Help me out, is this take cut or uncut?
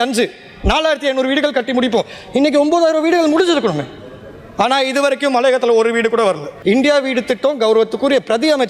cut